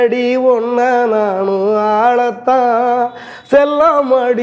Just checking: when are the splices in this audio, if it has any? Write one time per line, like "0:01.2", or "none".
none

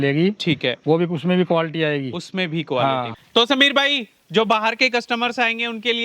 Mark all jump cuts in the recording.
0:03.2

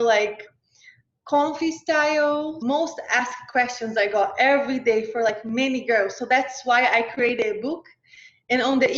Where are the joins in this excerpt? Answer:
0:02.5

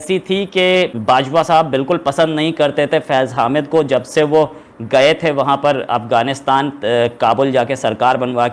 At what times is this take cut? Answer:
none

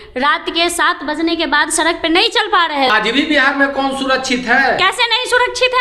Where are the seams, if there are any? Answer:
0:02.9

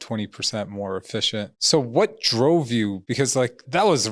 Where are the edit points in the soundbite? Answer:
0:01.6
0:03.1

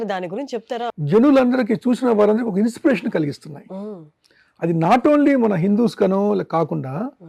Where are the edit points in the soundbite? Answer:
0:00.9

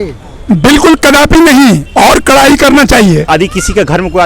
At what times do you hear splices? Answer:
0:03.3

